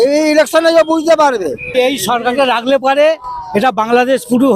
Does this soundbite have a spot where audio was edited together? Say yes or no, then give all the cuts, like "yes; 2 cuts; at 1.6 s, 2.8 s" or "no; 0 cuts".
yes; 1 cut; at 1.7 s